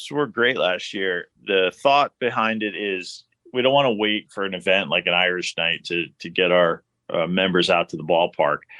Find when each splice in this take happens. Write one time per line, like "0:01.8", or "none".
0:01.3
0:03.4

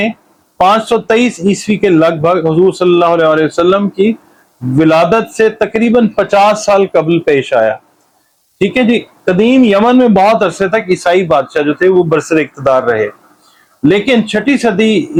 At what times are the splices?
none

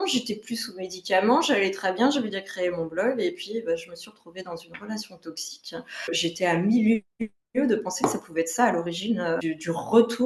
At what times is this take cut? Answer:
0:06.2
0:09.4

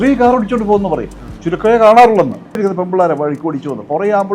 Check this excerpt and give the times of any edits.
0:02.6

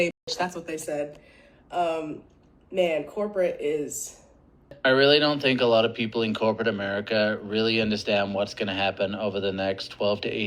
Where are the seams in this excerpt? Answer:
0:04.8

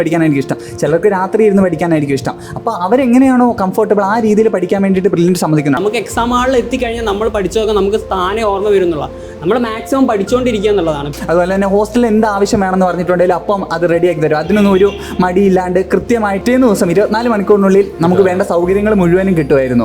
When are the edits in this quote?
0:05.8
0:11.1
0:16.4

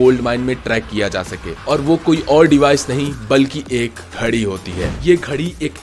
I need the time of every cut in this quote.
0:04.0
0:04.9

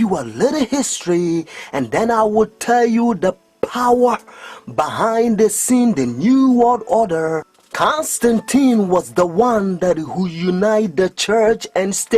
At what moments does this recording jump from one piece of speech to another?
0:04.3

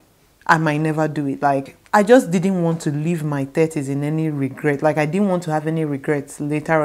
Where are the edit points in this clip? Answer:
none

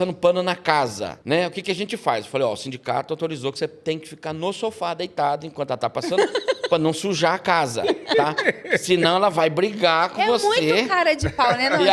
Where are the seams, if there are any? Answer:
0:01.1

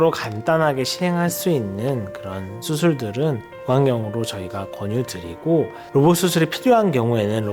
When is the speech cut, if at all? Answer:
0:03.5
0:05.8

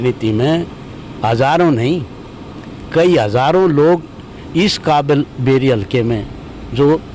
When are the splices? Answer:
none

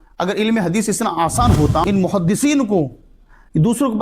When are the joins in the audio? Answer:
0:01.8

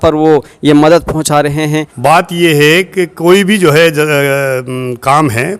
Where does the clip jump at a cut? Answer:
0:01.9

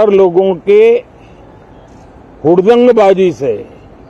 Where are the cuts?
none

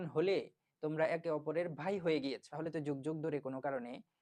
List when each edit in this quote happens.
0:02.5

